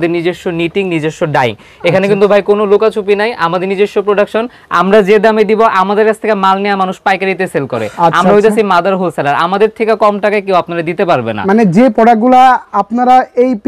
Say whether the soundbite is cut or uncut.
uncut